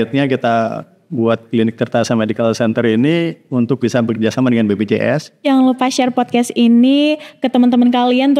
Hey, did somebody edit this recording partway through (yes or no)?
yes